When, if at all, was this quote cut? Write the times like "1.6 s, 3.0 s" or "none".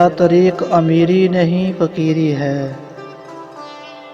2.9 s